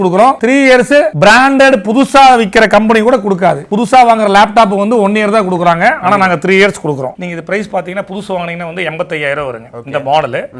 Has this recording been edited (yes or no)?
yes